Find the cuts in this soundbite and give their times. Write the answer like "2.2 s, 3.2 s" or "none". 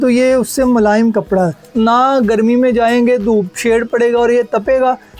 1.6 s